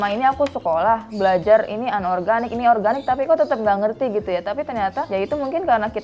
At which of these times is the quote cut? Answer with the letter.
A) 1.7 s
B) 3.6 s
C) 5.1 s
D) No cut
C